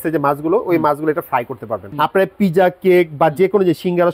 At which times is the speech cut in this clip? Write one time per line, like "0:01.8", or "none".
0:01.9

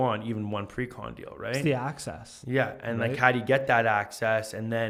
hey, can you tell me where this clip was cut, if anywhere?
none

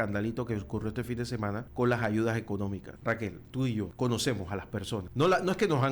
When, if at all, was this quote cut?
0:01.7
0:02.9
0:03.9
0:05.1

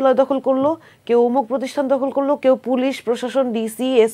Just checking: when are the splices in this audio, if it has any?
none

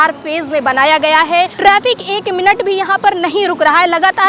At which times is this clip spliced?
0:01.5

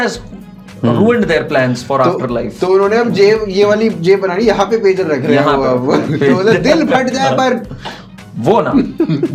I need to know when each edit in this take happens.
none

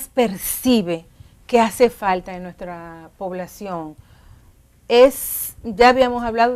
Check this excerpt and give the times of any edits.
0:05.5

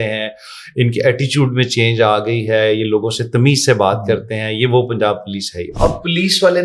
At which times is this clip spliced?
0:05.7

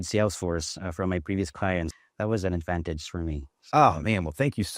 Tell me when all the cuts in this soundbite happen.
0:02.0

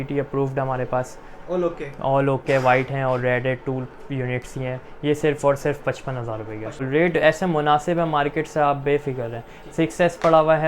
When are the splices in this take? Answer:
0:06.8

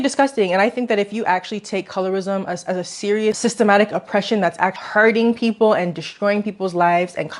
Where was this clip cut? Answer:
0:04.8

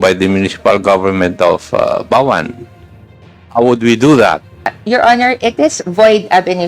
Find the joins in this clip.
0:04.7

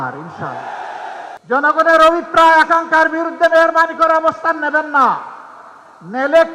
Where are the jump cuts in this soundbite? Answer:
0:01.4

